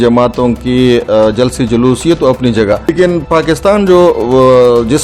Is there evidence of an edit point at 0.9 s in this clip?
no; 1 cut; at 2.8 s

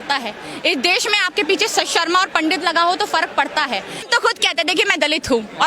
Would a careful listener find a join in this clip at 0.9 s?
no; 1 cut; at 4.0 s

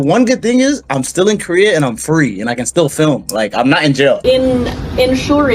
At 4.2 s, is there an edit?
yes; 1 cut; at 4.2 s

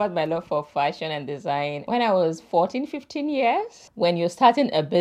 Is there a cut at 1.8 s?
yes; 2 cuts; at 1.8 s, 3.8 s

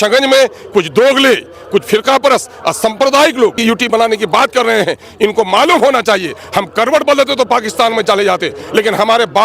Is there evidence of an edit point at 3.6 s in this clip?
yes; 1 cut; at 3.6 s

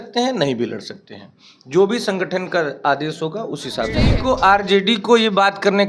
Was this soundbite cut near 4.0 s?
yes; 1 cut; at 4.0 s

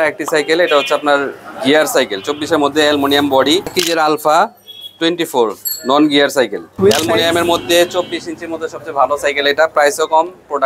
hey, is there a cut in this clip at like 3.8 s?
yes; 2 cuts; at 3.8 s, 6.6 s

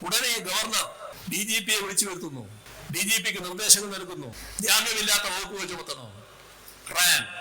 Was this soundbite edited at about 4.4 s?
yes; 3 cuts; at 1.2 s, 2.6 s, 4.4 s

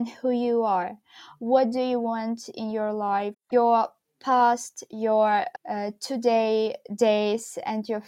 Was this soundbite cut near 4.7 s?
no; 1 cut; at 3.4 s

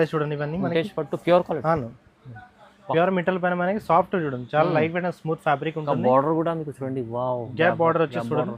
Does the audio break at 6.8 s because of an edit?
no; 0 cuts

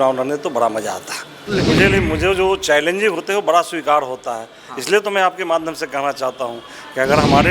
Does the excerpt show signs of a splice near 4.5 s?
no; 1 cut; at 1.7 s

